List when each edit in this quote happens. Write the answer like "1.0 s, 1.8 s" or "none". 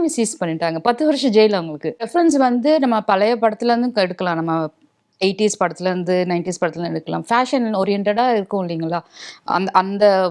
2.1 s